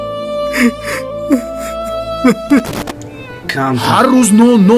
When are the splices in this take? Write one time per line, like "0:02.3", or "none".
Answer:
0:02.8